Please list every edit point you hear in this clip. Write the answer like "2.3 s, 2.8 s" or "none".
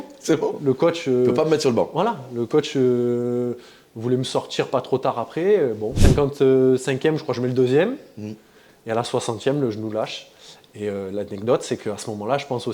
5.9 s